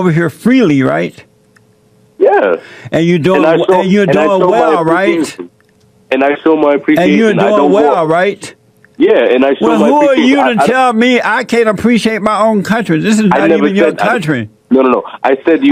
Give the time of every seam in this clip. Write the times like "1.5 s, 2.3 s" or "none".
none